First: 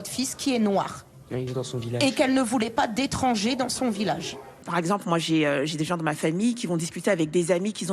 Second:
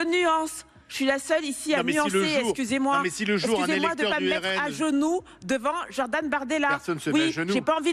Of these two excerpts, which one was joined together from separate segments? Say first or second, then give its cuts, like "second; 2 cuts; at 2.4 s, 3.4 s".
first; 2 cuts; at 1.5 s, 4.7 s